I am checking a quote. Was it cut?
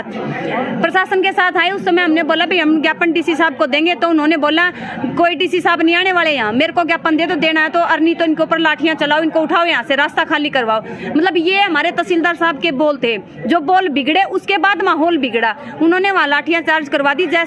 no; 0 cuts

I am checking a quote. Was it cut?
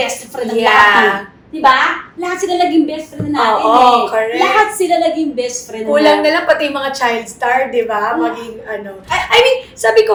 no; 0 cuts

